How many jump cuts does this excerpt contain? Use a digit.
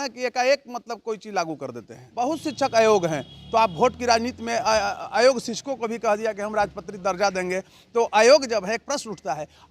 1